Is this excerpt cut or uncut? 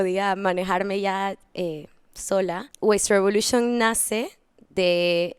cut